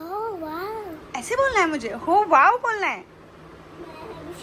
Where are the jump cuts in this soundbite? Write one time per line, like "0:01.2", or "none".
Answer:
0:03.0